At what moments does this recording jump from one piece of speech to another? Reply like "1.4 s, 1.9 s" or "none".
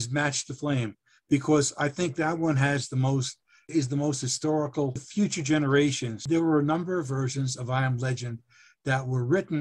3.7 s, 5.1 s, 6.1 s